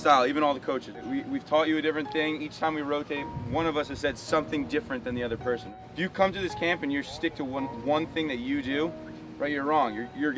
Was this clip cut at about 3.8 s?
no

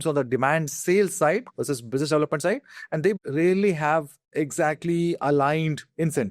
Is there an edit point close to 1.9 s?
no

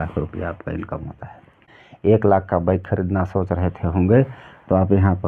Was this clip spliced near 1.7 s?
yes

